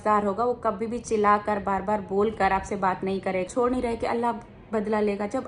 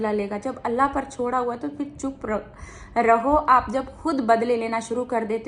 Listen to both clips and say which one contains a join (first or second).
first